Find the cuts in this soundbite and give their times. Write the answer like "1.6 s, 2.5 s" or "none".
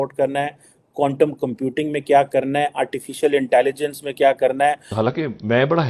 4.9 s